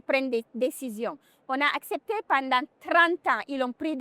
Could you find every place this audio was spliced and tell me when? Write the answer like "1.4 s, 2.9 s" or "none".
none